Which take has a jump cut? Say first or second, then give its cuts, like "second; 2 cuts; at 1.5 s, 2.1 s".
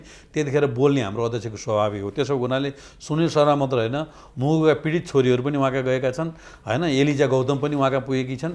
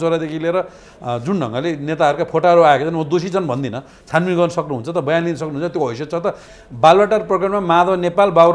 second; 1 cut; at 6.5 s